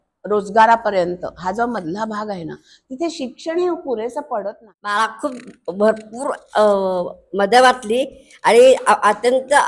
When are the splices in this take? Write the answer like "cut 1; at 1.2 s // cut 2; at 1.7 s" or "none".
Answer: cut 1; at 5.0 s